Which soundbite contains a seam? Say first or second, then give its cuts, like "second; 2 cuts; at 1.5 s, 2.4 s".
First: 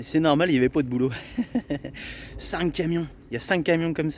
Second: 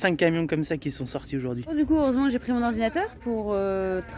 second; 1 cut; at 1.9 s